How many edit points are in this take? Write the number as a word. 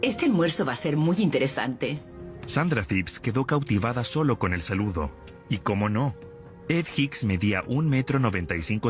one